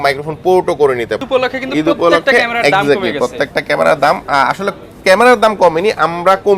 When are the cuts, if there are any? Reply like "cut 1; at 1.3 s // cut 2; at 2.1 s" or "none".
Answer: cut 1; at 1.2 s